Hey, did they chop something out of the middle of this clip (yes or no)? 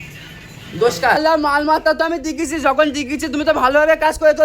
yes